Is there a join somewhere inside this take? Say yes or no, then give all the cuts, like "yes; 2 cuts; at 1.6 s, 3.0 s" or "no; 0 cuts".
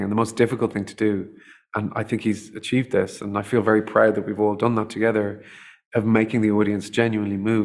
no; 0 cuts